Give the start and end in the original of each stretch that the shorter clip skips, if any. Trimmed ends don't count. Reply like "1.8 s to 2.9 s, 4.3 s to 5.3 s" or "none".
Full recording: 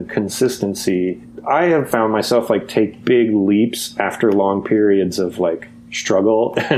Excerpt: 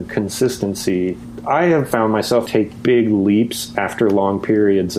2.5 s to 2.7 s